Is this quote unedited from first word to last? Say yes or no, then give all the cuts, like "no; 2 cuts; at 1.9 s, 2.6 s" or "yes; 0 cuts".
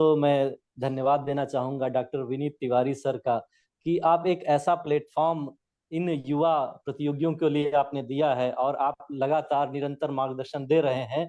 yes; 0 cuts